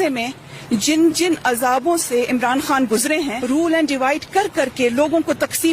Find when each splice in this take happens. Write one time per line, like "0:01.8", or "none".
0:03.4